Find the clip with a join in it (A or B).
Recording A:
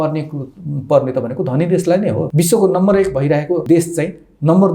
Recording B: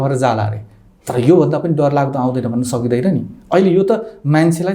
A